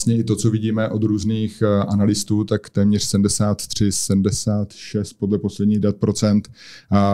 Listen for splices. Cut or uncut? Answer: uncut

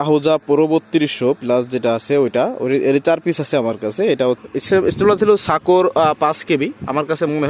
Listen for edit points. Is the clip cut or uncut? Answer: cut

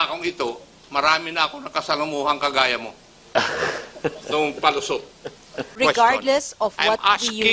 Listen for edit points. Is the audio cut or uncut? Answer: cut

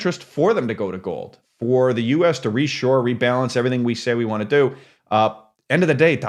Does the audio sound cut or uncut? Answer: cut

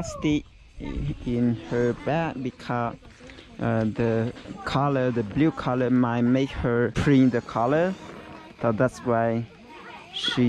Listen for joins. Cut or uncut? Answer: uncut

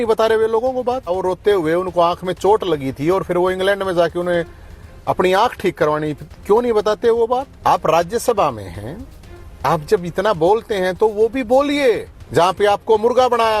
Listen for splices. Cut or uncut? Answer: cut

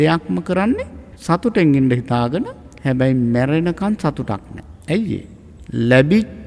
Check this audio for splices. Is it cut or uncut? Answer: uncut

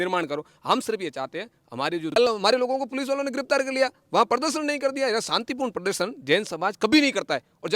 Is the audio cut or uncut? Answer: cut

